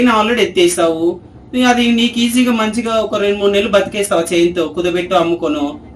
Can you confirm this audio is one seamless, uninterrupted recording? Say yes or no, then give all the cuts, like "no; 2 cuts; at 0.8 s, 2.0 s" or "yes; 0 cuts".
yes; 0 cuts